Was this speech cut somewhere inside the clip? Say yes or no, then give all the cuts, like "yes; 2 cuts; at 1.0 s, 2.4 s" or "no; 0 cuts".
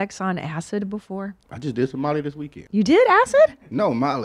yes; 2 cuts; at 1.5 s, 2.5 s